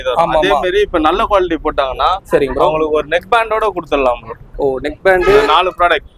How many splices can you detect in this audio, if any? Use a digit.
0